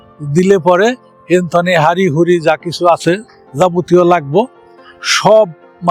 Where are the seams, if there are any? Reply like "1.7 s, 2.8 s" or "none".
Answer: none